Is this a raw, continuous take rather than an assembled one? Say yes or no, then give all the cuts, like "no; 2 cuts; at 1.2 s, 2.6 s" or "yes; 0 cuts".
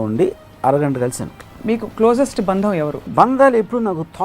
no; 2 cuts; at 1.5 s, 3.1 s